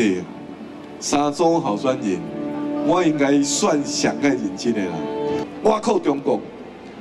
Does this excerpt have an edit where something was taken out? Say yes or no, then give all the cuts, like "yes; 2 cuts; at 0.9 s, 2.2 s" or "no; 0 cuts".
yes; 1 cut; at 5.4 s